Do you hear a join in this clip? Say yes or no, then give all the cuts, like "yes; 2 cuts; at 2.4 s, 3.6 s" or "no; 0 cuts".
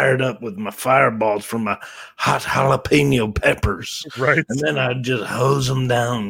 no; 0 cuts